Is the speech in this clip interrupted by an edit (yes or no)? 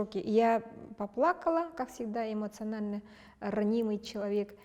no